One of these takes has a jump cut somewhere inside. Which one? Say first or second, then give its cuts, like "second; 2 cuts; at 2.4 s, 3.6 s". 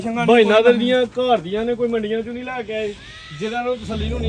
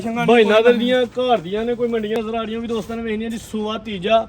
second; 1 cut; at 2.2 s